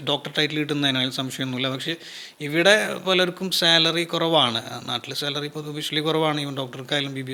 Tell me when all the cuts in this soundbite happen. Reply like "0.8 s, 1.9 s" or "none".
none